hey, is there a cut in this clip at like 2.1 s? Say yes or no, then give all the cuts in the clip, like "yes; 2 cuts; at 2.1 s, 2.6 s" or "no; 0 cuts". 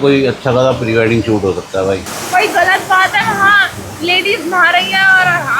yes; 1 cut; at 2.1 s